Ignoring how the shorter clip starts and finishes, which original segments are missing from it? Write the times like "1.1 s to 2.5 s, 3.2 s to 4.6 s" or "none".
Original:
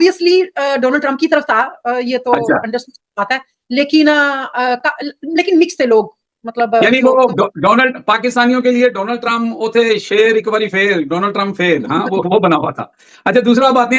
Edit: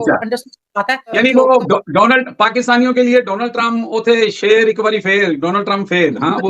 3.6 s to 6.8 s